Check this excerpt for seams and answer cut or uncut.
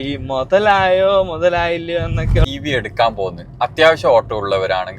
cut